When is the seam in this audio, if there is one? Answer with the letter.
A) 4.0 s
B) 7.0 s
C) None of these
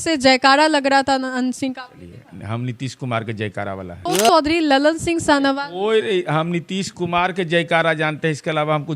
A